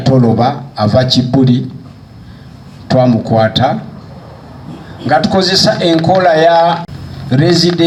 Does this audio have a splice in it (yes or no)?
no